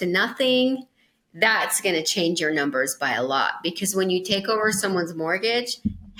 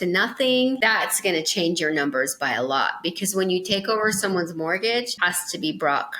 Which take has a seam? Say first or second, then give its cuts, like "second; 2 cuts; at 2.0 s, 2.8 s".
second; 2 cuts; at 0.8 s, 5.1 s